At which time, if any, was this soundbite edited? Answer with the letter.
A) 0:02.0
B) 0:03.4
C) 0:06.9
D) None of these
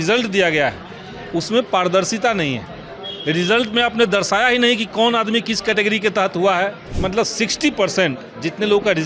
C